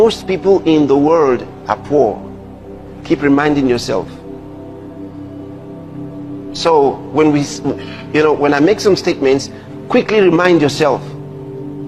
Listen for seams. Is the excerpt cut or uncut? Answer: uncut